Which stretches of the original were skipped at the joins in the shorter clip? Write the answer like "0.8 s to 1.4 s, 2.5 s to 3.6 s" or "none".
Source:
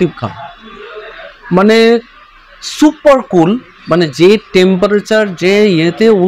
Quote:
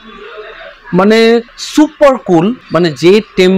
2.2 s to 2.6 s, 3.7 s to 3.8 s